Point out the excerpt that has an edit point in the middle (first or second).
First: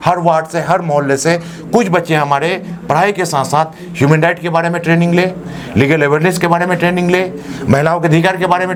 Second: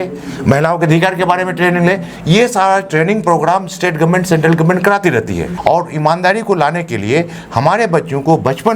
second